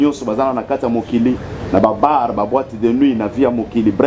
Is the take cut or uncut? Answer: uncut